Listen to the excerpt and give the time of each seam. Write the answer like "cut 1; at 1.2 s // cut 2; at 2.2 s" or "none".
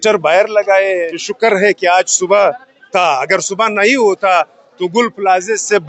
cut 1; at 1.2 s

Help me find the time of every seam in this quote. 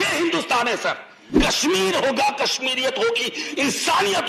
cut 1; at 1.4 s

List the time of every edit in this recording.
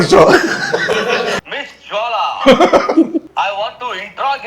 cut 1; at 1.3 s // cut 2; at 3.3 s

